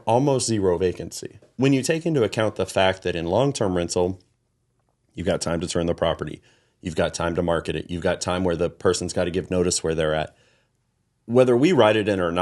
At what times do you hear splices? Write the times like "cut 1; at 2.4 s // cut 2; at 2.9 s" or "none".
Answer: cut 1; at 1.5 s